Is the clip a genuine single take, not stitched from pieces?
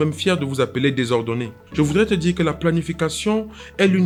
yes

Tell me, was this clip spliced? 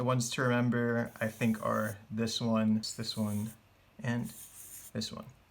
yes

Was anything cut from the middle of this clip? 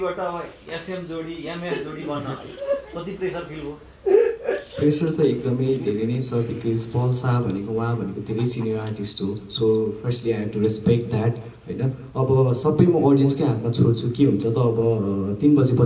no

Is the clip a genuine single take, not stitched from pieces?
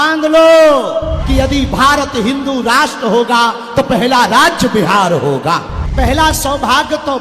no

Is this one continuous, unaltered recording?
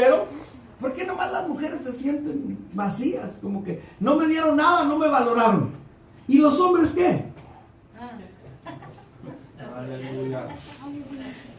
no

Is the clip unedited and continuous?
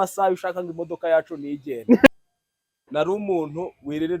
no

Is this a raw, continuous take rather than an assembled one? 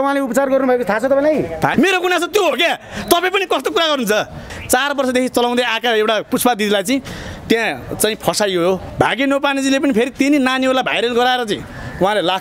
no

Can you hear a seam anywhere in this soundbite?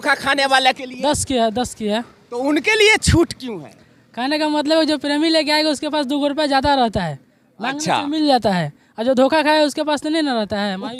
no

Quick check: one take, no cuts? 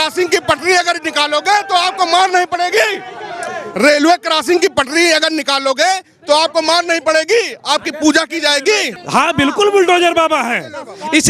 no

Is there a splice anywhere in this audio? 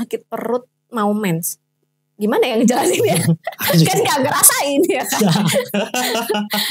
no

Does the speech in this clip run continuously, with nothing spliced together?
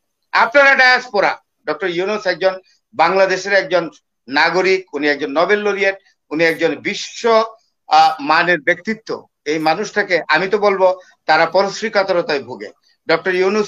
no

